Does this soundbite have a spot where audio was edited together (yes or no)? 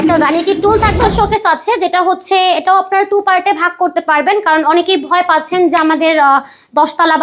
yes